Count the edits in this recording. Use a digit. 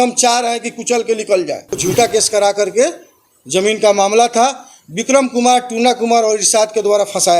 1